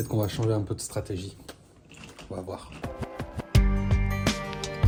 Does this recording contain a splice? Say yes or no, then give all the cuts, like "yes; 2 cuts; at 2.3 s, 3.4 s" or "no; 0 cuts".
no; 0 cuts